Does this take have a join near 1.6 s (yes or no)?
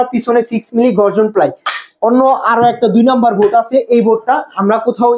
no